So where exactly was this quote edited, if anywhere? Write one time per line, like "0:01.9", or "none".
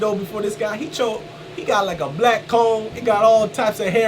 0:02.9